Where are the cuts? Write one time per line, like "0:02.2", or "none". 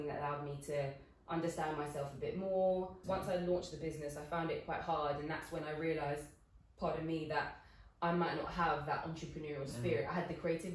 0:03.0